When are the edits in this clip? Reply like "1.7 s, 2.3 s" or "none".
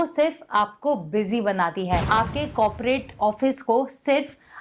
2.1 s